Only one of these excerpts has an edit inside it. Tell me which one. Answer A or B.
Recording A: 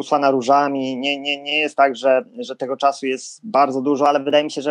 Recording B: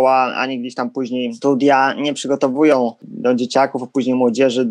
B